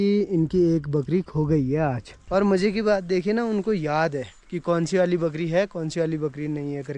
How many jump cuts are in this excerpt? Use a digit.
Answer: 1